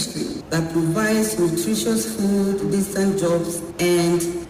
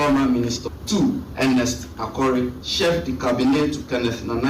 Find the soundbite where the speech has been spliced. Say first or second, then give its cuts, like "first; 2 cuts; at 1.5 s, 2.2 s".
second; 2 cuts; at 1.1 s, 2.6 s